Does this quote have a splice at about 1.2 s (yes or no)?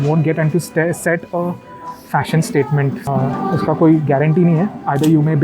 no